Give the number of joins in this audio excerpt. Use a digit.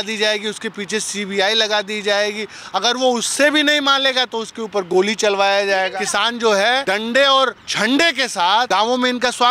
4